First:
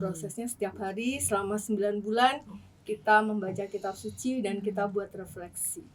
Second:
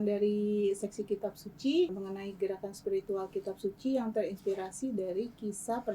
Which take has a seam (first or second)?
second